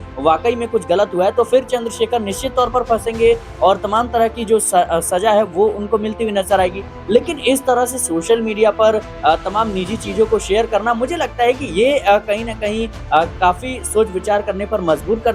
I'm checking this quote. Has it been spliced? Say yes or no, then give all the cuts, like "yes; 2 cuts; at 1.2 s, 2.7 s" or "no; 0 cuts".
no; 0 cuts